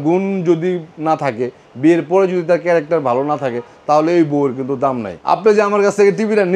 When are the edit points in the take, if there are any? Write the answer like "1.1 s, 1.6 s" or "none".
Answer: 5.1 s